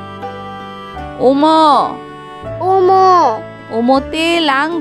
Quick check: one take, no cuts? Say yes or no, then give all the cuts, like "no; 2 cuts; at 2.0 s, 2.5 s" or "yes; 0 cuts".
no; 1 cut; at 1.2 s